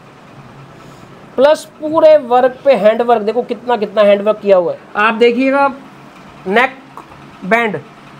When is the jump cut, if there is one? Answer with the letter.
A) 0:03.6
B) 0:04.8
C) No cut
B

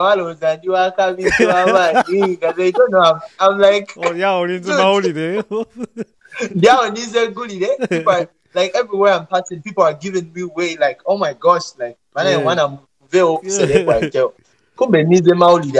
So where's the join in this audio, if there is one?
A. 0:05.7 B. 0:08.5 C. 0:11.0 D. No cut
D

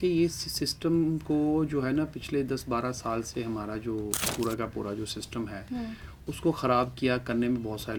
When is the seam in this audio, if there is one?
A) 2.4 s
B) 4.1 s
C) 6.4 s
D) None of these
D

